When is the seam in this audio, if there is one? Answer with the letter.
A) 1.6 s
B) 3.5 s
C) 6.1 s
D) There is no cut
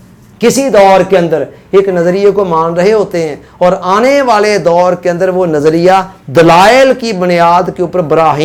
D